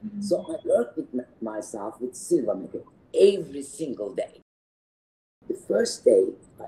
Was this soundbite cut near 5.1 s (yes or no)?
yes